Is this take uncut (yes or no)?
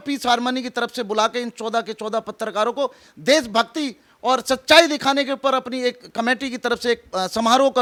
yes